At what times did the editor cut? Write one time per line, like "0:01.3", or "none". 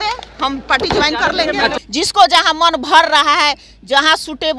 0:01.8